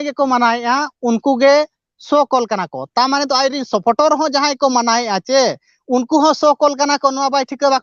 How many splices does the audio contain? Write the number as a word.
zero